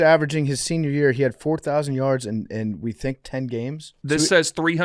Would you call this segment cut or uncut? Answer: cut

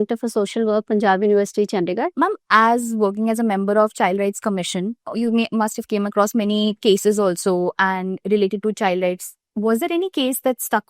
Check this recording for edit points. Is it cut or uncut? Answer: cut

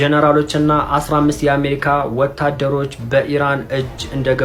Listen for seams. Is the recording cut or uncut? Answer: uncut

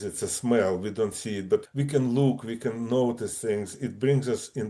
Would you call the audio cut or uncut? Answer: cut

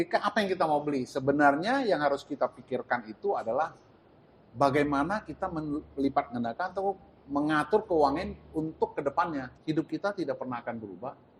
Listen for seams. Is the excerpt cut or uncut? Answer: cut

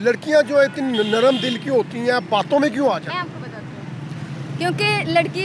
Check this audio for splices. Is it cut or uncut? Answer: uncut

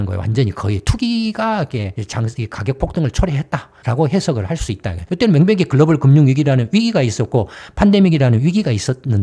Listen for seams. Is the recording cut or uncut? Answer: uncut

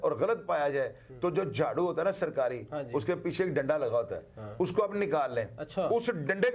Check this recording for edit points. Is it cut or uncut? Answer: uncut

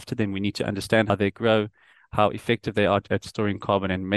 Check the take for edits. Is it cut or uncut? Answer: uncut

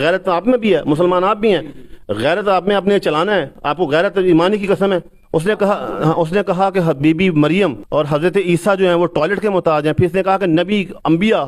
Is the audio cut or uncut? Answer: cut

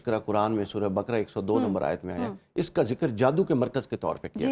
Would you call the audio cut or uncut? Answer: uncut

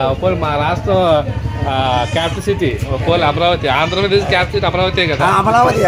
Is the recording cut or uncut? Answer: uncut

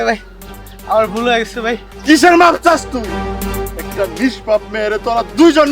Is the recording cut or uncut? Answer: cut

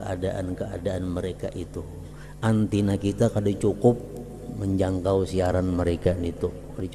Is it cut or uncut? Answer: uncut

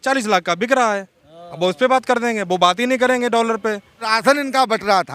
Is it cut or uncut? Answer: cut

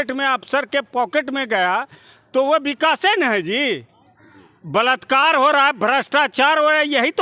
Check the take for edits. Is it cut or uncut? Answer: uncut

